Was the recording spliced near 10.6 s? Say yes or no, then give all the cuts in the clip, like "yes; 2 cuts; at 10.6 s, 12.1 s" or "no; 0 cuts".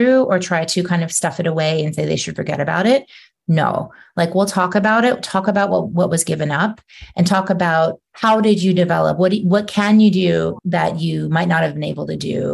yes; 2 cuts; at 8.1 s, 10.6 s